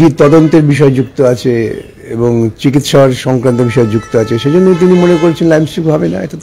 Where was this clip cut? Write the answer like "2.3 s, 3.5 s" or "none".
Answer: none